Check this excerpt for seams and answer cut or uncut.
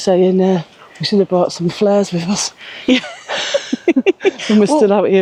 uncut